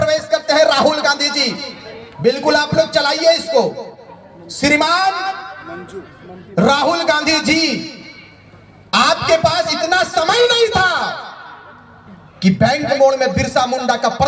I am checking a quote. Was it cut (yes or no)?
no